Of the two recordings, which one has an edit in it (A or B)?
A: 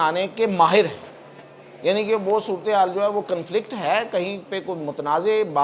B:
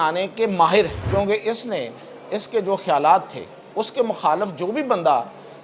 B